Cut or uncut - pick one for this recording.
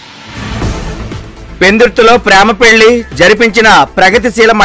cut